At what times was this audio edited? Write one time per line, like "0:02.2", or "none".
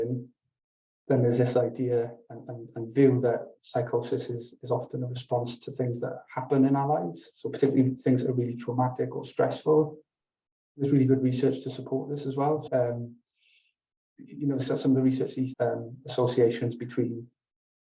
0:12.7
0:15.5